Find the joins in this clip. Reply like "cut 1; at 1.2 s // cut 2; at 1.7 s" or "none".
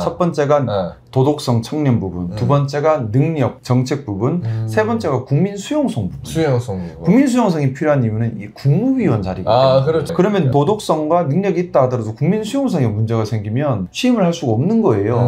cut 1; at 10.1 s